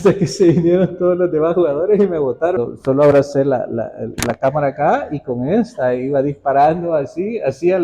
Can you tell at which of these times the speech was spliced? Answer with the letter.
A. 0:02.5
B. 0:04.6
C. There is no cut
A